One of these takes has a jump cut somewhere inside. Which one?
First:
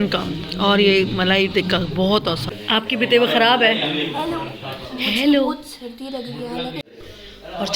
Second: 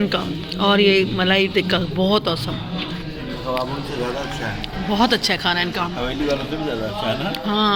first; 2 cuts; at 2.6 s, 6.8 s

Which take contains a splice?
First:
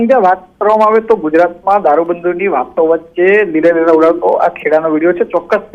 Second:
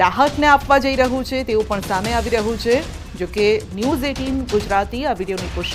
first; 1 cut; at 1.7 s

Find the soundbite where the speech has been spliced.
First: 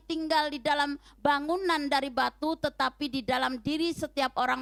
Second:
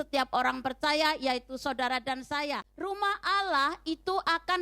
second; 1 cut; at 2.7 s

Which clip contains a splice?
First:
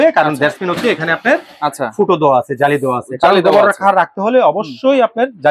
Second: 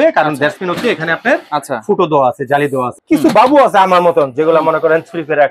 second; 2 cuts; at 1.4 s, 3.0 s

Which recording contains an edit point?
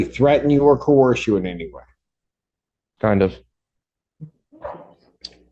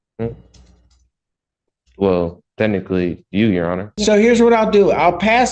second; 1 cut; at 3.9 s

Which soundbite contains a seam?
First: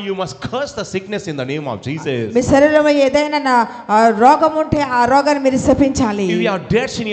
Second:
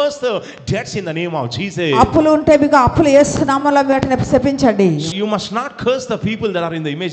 second; 1 cut; at 5.1 s

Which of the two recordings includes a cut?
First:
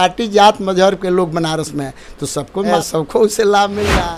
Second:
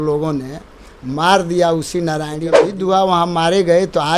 second; 1 cut; at 2.6 s

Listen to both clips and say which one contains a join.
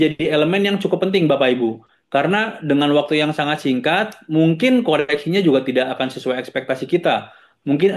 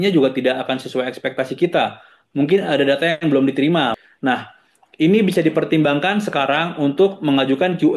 second; 1 cut; at 3.9 s

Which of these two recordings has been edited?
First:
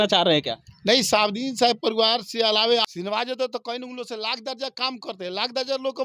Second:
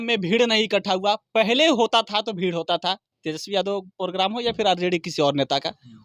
first; 1 cut; at 2.8 s

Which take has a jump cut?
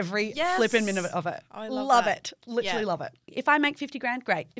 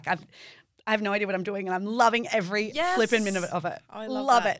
first; 1 cut; at 3.3 s

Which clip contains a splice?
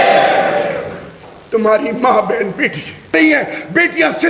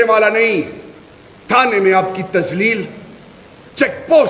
first; 1 cut; at 3.1 s

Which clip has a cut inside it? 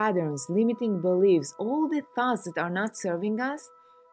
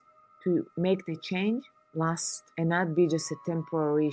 second; 1 cut; at 2.4 s

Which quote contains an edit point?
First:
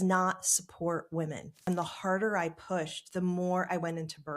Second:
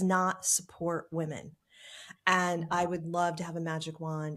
first; 1 cut; at 1.7 s

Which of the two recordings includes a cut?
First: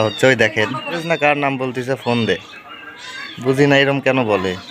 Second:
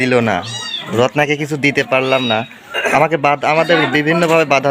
first; 1 cut; at 0.9 s

